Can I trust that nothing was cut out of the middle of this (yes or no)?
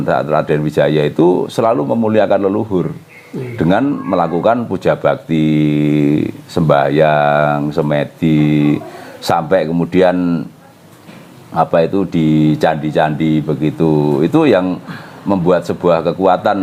yes